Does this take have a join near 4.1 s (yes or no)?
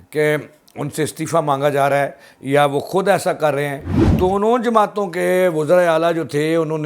yes